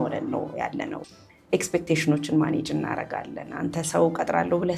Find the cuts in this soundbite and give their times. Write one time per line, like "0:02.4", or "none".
0:01.0